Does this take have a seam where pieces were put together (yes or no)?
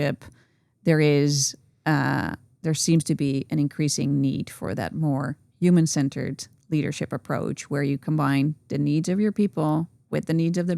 no